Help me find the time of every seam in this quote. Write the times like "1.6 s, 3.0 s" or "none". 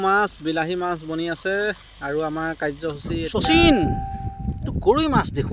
3.1 s